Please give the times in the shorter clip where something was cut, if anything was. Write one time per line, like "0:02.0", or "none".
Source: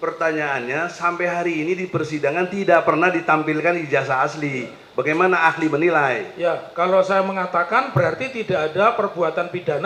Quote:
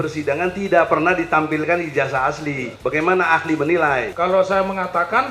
0:02.7
0:04.1